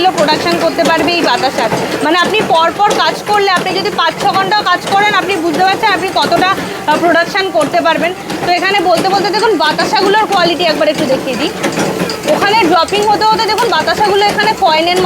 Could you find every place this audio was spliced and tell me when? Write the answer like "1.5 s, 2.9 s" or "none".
none